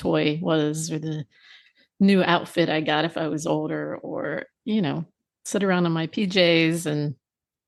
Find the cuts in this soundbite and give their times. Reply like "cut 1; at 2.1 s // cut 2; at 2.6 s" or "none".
none